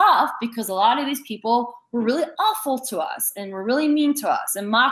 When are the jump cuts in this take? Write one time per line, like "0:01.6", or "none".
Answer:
none